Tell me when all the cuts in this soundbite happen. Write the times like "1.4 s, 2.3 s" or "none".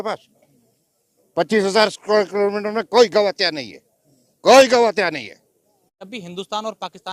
6.2 s

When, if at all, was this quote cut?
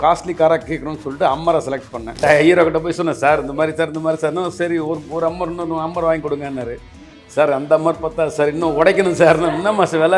2.1 s

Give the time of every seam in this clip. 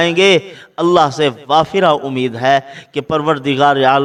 none

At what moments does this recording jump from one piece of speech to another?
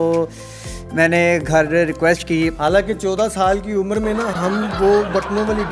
none

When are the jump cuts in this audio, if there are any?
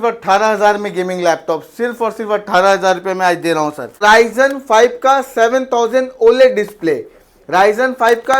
4.0 s

